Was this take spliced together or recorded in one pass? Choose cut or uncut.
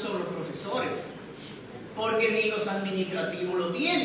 uncut